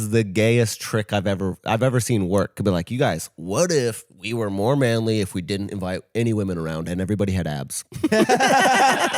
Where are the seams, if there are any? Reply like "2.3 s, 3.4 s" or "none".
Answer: none